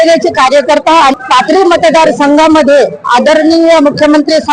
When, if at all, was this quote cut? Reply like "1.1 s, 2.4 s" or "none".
1.1 s